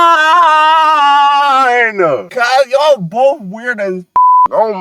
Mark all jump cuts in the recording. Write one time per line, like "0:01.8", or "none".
0:02.3